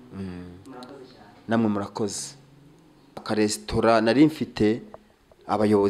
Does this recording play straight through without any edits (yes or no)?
no